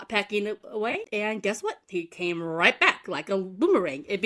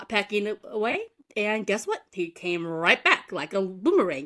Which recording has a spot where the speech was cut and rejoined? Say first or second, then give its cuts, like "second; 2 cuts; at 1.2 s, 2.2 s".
first; 1 cut; at 1.0 s